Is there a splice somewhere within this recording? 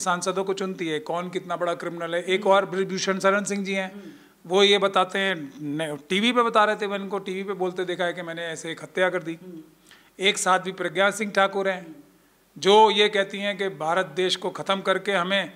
no; 0 cuts

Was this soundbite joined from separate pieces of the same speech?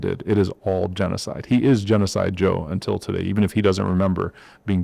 no; 0 cuts

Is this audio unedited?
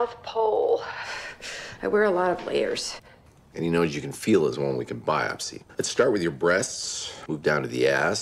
yes; 0 cuts

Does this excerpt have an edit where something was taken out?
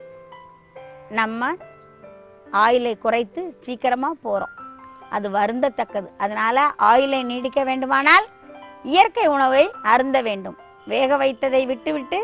no; 0 cuts

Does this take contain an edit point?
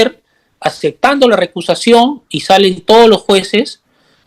no; 0 cuts

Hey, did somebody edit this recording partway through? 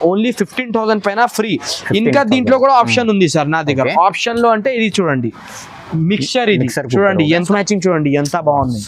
yes; 1 cut; at 7.4 s

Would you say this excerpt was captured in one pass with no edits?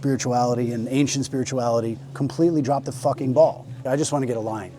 no; 1 cut; at 3.8 s

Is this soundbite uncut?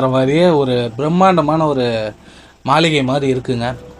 yes; 0 cuts

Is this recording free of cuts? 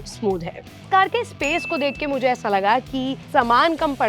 no; 2 cuts; at 0.8 s, 3.2 s

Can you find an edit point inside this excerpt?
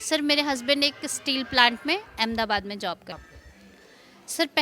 yes; 1 cut; at 3.2 s

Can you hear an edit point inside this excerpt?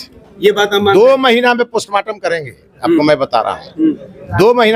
no; 0 cuts

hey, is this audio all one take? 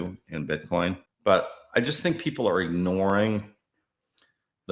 no; 1 cut; at 1.1 s

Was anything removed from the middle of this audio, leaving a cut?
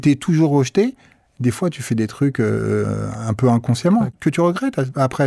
yes; 1 cut; at 4.1 s

